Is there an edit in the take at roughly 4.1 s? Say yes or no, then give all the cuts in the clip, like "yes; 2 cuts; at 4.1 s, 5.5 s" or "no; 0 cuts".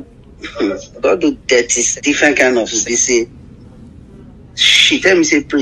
no; 2 cuts; at 1.8 s, 2.8 s